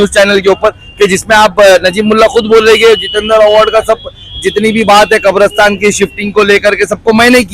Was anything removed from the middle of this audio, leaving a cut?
no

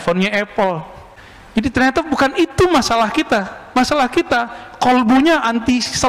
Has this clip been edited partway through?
no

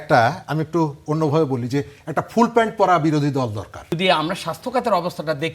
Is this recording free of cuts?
no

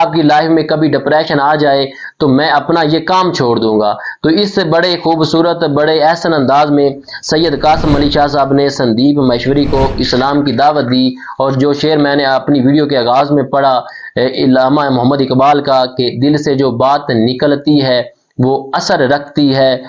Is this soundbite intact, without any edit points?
yes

